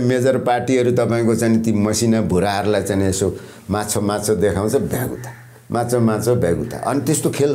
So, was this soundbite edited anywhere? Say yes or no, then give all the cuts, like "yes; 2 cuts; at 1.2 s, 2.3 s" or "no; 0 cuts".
no; 0 cuts